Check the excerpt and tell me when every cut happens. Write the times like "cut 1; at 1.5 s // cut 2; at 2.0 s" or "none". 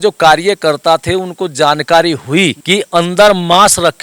cut 1; at 2.6 s